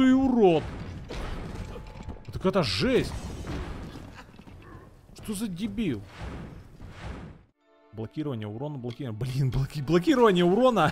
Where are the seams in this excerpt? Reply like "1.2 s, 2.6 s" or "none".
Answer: 7.5 s